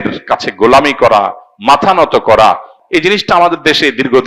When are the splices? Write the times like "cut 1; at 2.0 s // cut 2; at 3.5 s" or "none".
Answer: cut 1; at 2.7 s